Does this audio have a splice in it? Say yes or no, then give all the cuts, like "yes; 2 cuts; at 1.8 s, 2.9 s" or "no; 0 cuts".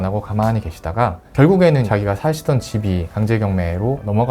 yes; 1 cut; at 3.1 s